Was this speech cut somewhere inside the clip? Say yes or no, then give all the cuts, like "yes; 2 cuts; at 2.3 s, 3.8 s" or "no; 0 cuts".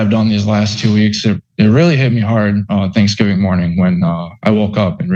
no; 0 cuts